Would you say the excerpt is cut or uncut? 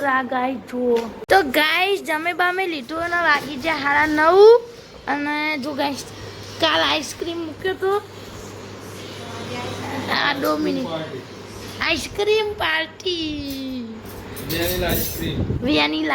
cut